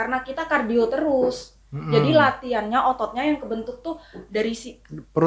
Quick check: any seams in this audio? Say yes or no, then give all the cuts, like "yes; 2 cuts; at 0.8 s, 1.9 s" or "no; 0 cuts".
no; 0 cuts